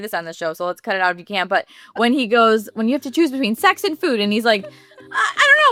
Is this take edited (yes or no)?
no